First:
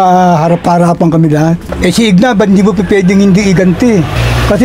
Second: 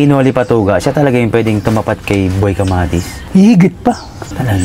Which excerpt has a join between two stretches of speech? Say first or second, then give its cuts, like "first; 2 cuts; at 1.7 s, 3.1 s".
first; 1 cut; at 1.6 s